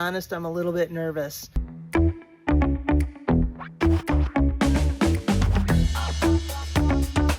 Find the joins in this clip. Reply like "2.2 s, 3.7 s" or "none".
1.7 s